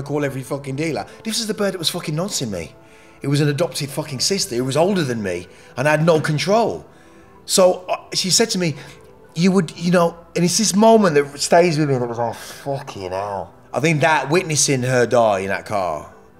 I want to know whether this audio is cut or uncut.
cut